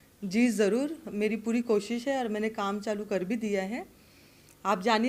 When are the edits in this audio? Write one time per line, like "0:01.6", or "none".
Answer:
none